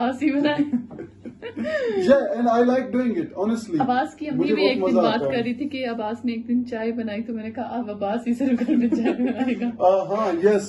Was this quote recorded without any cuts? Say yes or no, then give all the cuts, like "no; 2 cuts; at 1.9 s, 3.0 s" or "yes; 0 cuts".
yes; 0 cuts